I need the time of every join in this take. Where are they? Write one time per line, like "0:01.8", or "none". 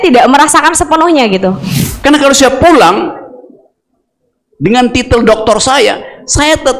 0:01.7